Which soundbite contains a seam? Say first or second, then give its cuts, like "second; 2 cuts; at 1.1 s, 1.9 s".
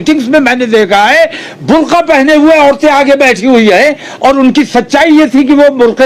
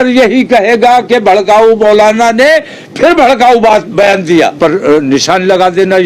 second; 1 cut; at 4.5 s